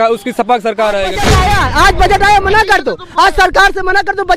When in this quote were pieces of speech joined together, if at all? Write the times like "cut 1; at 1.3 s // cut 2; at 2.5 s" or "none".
cut 1; at 1.3 s